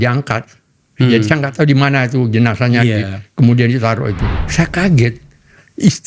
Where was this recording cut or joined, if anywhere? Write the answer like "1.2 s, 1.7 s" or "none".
4.3 s